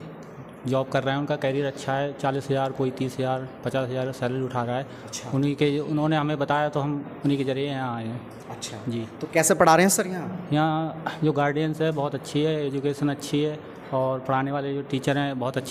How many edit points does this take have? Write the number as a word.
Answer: zero